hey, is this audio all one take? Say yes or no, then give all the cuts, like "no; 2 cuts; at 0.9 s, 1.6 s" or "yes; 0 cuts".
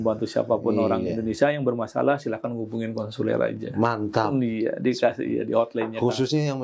yes; 0 cuts